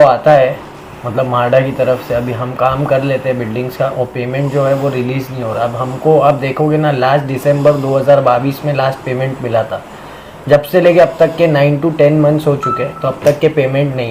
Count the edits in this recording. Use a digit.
0